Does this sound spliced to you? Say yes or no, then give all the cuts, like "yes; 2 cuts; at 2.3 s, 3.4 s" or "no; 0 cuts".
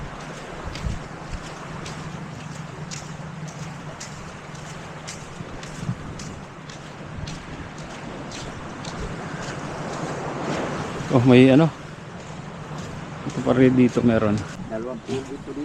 yes; 1 cut; at 14.5 s